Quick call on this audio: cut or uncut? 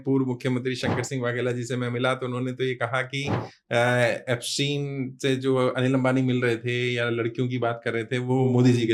uncut